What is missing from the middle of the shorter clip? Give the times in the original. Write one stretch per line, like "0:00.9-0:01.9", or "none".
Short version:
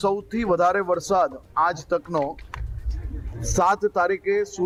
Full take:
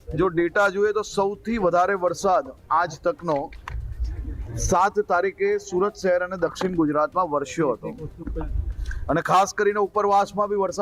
none